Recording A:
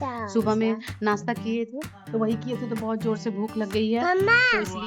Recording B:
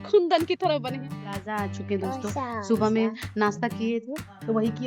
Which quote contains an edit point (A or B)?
B